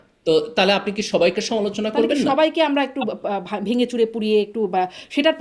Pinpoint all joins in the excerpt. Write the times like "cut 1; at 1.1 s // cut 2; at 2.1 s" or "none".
none